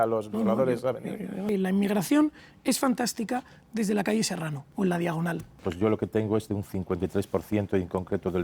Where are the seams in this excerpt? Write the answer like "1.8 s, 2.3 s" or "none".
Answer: 1.4 s, 4.6 s, 5.6 s